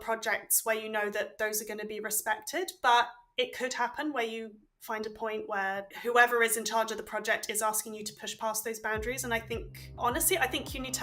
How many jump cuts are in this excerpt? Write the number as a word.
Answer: one